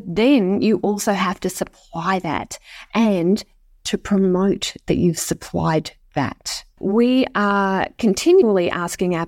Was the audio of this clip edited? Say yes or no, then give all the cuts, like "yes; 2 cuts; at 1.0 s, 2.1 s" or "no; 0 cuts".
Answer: yes; 2 cuts; at 6.7 s, 8.4 s